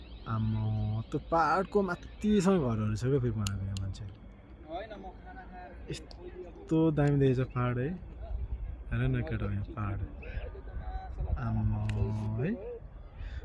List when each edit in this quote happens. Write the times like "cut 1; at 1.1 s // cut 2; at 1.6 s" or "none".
none